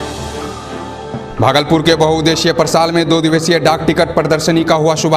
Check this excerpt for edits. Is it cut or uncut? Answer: cut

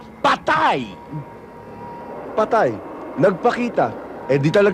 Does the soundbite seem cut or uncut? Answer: uncut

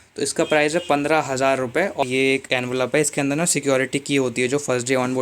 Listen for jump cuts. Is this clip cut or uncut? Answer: cut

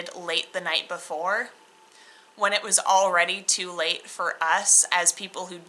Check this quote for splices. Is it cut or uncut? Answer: uncut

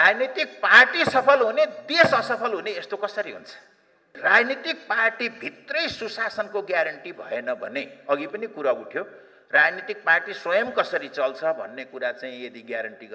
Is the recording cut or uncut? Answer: cut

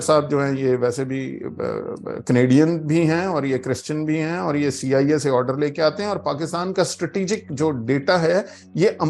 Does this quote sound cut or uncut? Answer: uncut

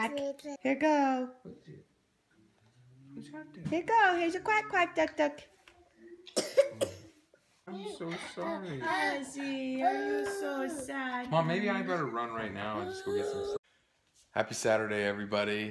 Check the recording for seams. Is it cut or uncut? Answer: uncut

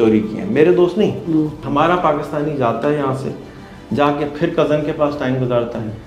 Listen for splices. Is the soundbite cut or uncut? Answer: cut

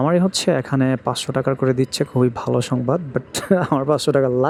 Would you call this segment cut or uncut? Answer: uncut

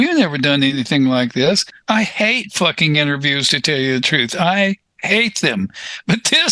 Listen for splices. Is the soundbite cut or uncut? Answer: uncut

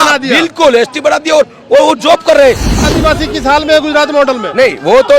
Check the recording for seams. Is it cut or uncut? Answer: cut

